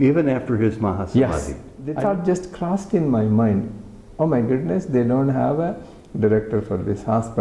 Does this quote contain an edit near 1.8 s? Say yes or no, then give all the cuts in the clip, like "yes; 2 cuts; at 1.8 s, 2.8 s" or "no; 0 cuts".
yes; 1 cut; at 1.8 s